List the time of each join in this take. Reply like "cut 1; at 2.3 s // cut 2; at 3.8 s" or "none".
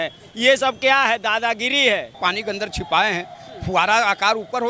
cut 1; at 2.2 s